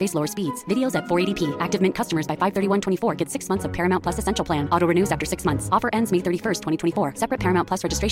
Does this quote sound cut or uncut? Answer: uncut